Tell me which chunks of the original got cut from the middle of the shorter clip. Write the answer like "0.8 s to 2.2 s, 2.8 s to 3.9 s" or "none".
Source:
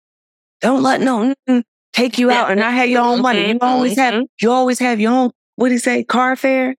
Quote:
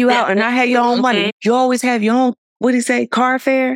3.5 s to 4.3 s

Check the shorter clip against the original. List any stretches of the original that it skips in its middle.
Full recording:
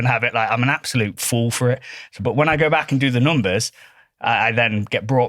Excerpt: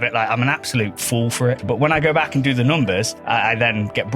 1.8 s to 2.2 s, 3.7 s to 4.1 s

